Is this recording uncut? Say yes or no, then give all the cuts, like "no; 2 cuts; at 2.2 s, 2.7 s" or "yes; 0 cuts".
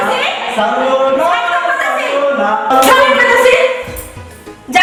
yes; 0 cuts